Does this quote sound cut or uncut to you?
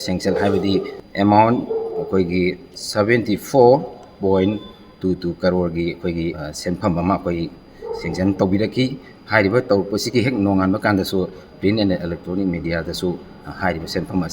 cut